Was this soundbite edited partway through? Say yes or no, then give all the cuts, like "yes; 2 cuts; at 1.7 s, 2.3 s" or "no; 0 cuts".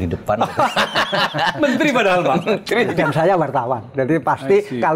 yes; 1 cut; at 3.0 s